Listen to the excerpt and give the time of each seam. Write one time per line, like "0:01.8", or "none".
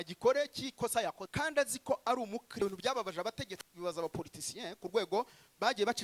0:01.2
0:02.6